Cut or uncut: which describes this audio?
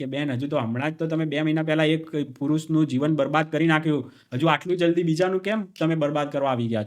uncut